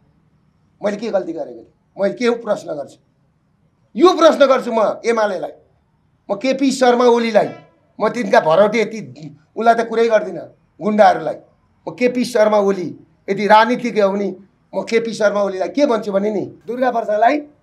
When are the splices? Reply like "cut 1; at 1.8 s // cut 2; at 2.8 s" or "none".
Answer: cut 1; at 16.6 s